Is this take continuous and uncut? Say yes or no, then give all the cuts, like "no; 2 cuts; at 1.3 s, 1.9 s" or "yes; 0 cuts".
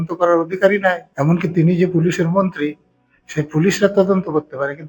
no; 1 cut; at 1.1 s